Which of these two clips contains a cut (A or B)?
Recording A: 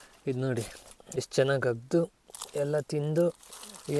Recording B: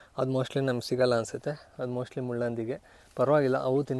A